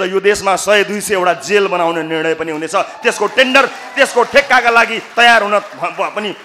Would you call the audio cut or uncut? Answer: uncut